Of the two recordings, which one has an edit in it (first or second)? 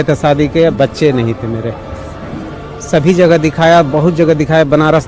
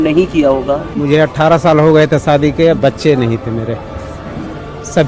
second